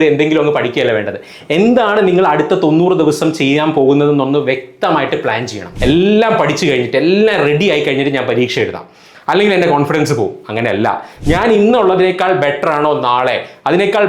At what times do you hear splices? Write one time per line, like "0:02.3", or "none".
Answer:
0:05.7
0:11.1

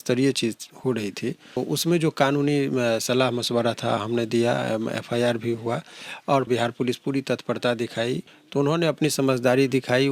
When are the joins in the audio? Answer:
0:01.6
0:06.5
0:08.4

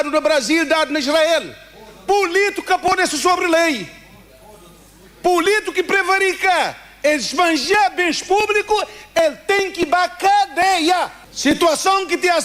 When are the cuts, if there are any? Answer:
0:11.2

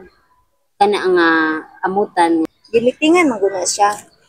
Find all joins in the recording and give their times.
0:02.5

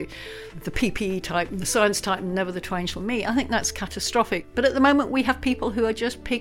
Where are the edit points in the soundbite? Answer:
0:04.5

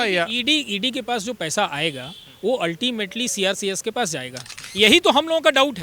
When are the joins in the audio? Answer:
0:04.6

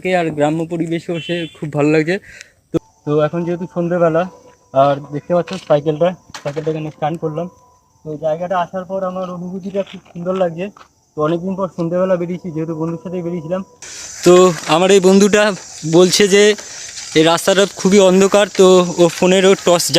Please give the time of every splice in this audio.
0:02.8
0:13.9

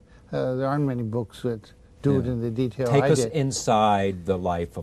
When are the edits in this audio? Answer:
0:03.3

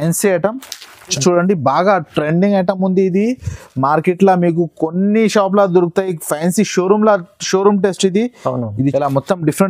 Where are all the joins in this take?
0:01.2
0:08.9

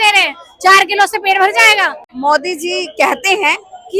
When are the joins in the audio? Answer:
0:02.1

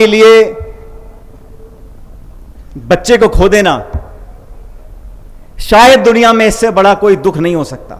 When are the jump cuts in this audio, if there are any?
none

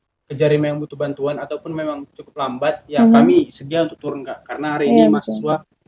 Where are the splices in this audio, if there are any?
none

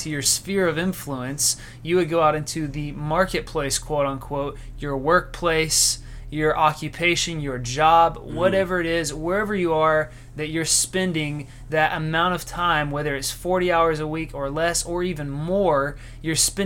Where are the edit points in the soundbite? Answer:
none

